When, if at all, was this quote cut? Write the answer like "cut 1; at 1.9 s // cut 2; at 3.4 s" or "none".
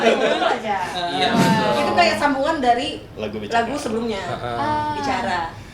cut 1; at 1.4 s

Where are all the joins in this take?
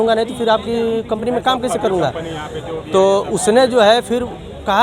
none

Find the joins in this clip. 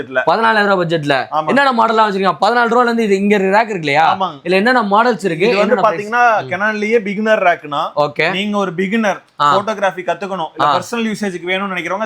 none

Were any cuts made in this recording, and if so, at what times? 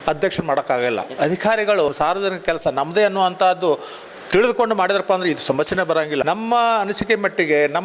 cut 1; at 1.1 s // cut 2; at 1.9 s // cut 3; at 6.2 s

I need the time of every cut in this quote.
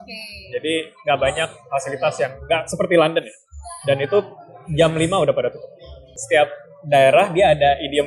cut 1; at 6.2 s

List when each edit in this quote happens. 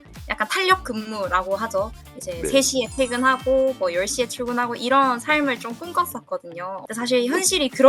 cut 1; at 6.8 s

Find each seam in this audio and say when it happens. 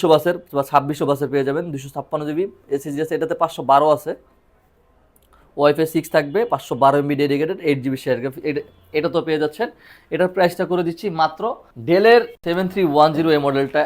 cut 1; at 11.7 s // cut 2; at 12.4 s

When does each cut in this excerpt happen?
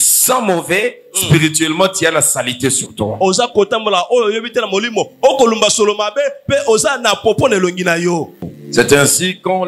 cut 1; at 8.4 s

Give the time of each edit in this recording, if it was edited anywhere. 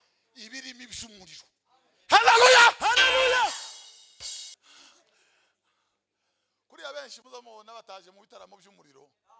cut 1; at 4.6 s

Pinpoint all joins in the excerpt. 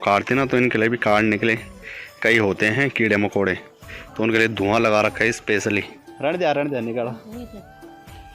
cut 1; at 6.0 s

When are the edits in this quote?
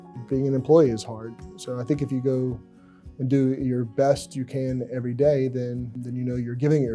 none

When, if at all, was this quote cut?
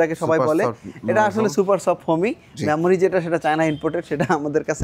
none

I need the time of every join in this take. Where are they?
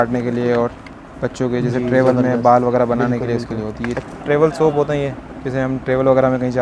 cut 1; at 4.0 s

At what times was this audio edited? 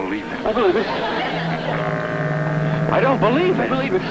cut 1; at 3.2 s

